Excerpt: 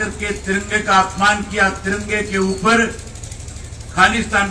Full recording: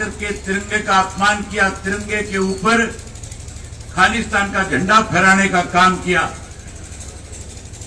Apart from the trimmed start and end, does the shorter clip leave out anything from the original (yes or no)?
no